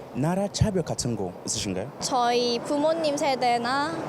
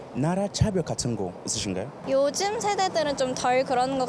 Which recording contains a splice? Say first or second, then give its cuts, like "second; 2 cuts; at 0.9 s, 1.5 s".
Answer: first; 1 cut; at 2.0 s